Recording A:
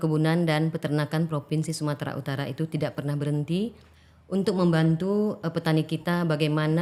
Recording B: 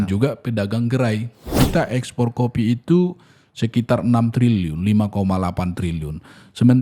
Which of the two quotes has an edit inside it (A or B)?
B